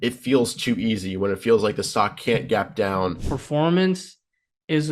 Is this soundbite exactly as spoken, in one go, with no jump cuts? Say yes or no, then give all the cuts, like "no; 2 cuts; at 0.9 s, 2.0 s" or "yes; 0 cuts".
no; 1 cut; at 3.3 s